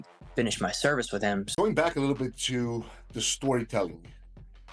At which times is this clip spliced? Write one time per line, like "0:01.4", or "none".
0:01.5